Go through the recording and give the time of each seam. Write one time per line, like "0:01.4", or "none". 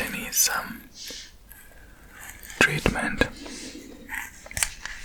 none